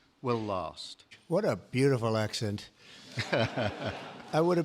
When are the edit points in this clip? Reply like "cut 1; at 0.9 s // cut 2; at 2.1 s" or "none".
cut 1; at 1.1 s